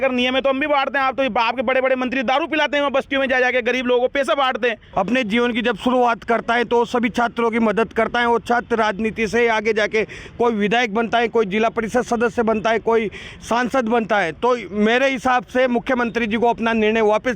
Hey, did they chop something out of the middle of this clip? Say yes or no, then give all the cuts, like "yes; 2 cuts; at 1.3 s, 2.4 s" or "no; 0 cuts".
yes; 1 cut; at 4.8 s